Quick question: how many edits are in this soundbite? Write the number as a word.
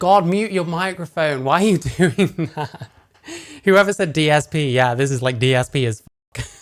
zero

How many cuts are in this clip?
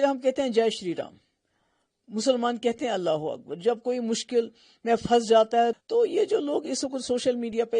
one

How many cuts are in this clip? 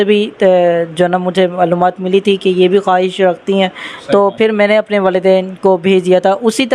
zero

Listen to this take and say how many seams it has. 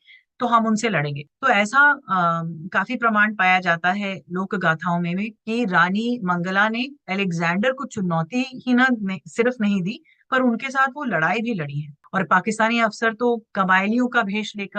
two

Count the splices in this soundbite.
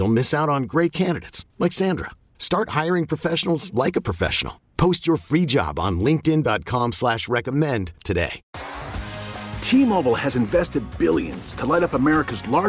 one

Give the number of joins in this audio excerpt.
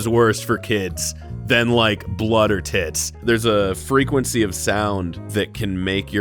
one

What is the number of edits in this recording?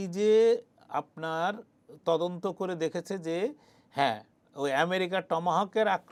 zero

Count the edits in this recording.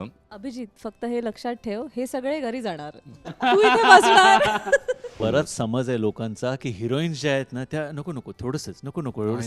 one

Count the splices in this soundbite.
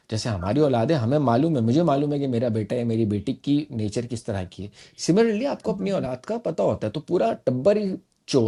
zero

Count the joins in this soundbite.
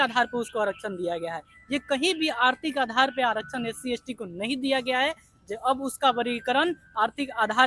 zero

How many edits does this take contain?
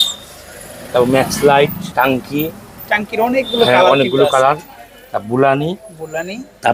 one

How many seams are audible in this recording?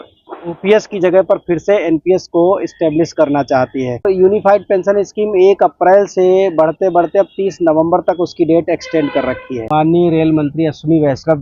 two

